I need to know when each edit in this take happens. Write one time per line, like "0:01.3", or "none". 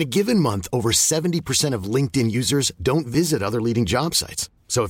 none